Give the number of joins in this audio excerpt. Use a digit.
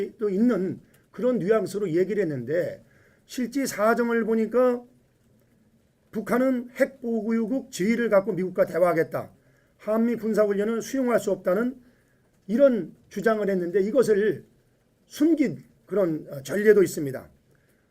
1